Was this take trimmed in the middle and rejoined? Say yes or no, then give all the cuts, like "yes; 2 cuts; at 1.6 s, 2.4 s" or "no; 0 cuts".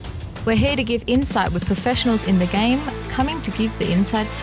no; 0 cuts